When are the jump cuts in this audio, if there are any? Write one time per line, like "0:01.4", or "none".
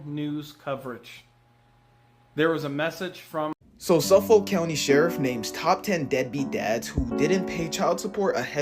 0:03.7